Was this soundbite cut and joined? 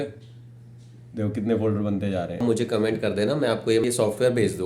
yes; 1 cut; at 2.4 s

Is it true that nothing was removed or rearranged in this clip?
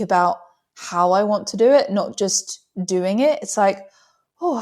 yes; 0 cuts

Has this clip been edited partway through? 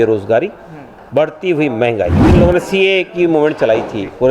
yes; 1 cut; at 2.2 s

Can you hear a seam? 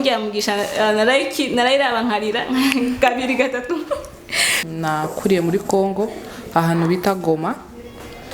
yes; 1 cut; at 4.5 s

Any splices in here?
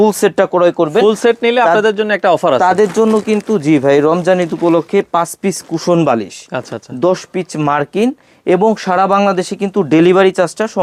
no; 0 cuts

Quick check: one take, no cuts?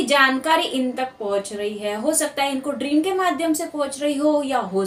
yes; 0 cuts

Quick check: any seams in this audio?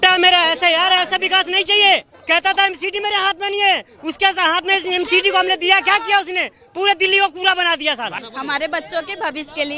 yes; 2 cuts; at 2.1 s, 8.2 s

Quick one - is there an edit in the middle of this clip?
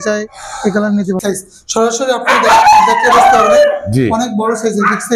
yes; 1 cut; at 1.2 s

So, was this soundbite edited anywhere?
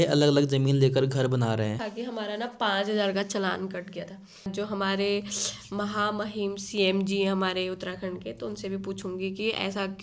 yes; 2 cuts; at 1.8 s, 4.5 s

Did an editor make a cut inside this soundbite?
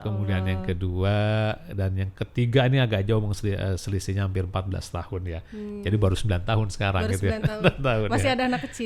no; 0 cuts

